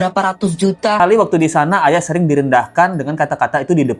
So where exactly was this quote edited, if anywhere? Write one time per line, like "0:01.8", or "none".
0:01.0